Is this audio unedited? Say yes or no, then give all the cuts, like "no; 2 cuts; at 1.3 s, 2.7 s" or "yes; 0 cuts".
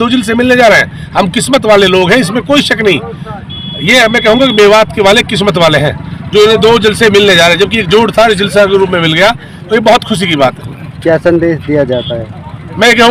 yes; 0 cuts